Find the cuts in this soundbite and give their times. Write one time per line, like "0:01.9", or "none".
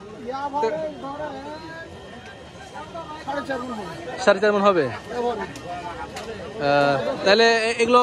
none